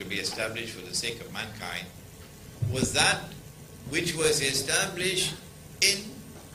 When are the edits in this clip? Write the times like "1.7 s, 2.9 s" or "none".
none